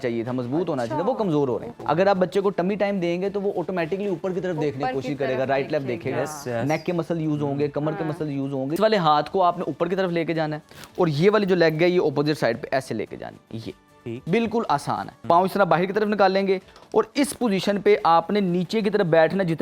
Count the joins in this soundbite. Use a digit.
3